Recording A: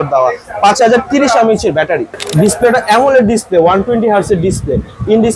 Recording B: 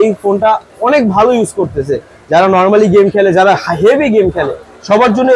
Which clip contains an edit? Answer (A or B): A